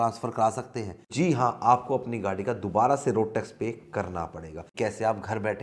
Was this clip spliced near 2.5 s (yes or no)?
no